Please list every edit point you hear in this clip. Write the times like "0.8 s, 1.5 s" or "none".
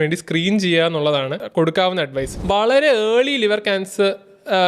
1.4 s, 2.3 s